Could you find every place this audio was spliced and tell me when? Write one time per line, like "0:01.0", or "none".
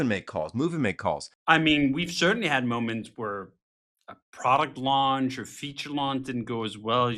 0:01.3